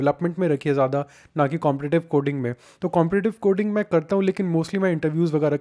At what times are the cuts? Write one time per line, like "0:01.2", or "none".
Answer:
none